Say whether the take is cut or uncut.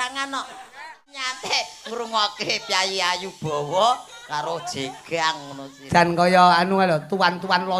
cut